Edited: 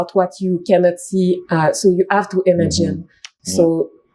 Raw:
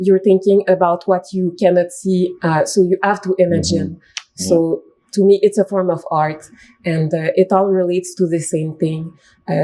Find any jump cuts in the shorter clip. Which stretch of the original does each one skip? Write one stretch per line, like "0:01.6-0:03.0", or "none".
none